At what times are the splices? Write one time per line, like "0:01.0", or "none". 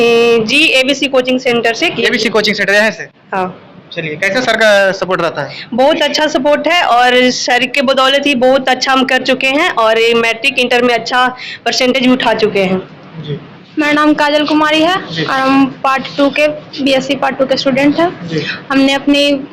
0:13.5